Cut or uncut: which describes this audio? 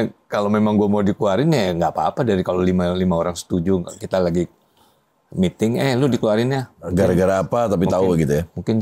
uncut